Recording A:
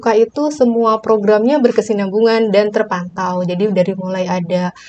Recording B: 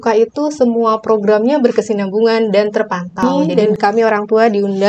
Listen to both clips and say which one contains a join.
B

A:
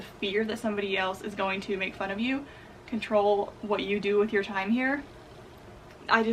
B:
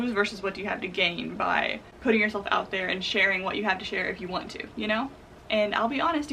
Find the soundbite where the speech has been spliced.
B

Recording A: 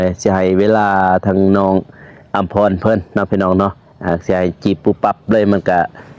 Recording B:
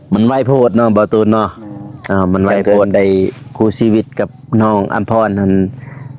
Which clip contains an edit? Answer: B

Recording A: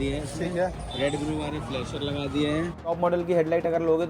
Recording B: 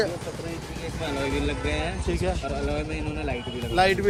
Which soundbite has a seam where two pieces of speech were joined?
A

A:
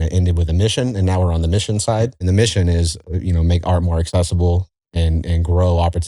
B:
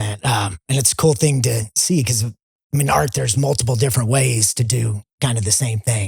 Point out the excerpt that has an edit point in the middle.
A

